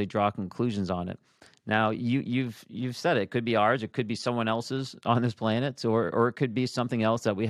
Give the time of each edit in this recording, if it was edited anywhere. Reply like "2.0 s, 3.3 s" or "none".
none